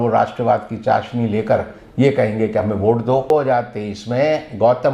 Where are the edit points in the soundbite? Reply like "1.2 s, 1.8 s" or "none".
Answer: 3.3 s